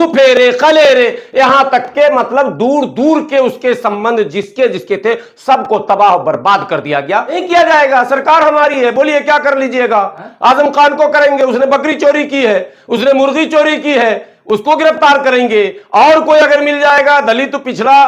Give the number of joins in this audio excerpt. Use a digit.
1